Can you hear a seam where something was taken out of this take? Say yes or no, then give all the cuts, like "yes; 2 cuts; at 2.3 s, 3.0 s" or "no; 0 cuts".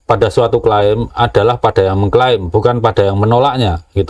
no; 0 cuts